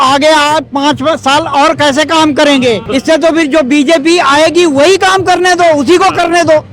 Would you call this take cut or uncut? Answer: cut